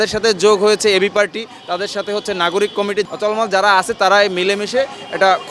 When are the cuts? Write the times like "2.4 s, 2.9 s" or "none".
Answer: 3.1 s

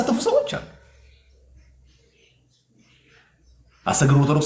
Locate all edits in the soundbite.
none

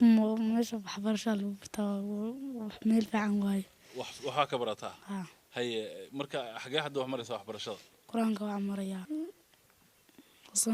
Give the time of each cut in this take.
9.1 s

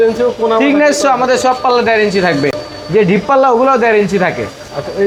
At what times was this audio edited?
none

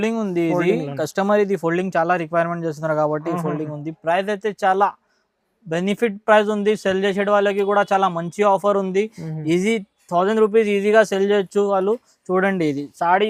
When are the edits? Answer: none

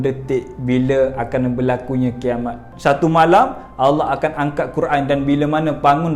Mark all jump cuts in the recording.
2.7 s

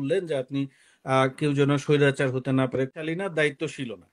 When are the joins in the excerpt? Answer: 3.0 s

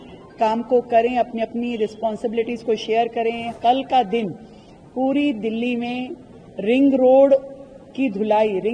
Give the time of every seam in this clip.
3.6 s

